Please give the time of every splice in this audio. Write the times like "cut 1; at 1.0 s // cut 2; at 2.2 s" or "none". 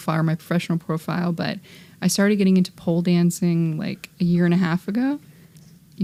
none